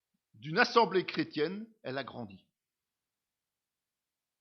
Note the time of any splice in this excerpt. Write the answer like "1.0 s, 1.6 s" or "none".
1.7 s